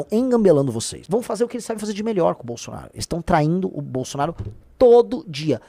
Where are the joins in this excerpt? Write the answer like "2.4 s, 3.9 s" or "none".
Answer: 1.0 s